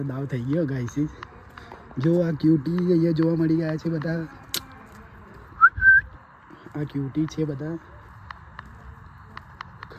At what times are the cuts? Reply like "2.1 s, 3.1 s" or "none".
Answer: none